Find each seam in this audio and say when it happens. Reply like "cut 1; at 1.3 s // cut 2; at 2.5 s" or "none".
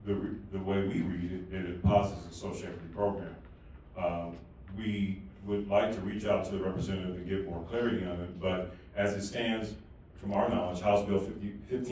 none